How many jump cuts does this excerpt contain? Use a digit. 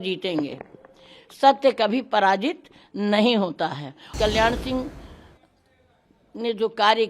1